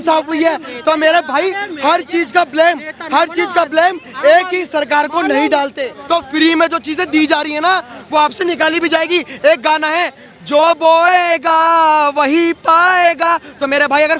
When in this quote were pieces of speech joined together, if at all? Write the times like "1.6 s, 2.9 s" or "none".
5.9 s

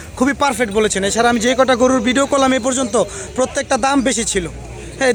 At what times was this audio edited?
none

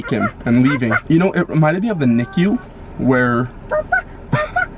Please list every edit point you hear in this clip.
1.0 s

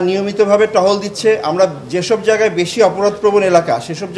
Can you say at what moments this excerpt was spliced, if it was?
none

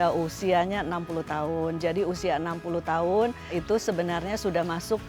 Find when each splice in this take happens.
3.6 s

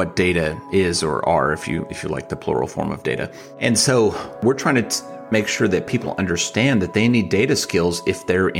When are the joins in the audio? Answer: 3.4 s, 4.4 s

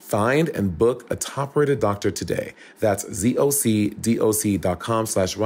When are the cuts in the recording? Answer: none

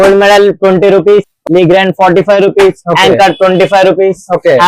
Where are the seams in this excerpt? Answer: none

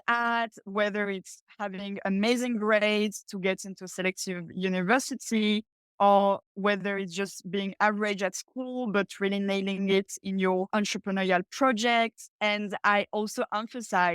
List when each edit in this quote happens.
12.2 s

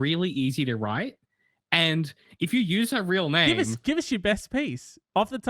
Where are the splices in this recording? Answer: none

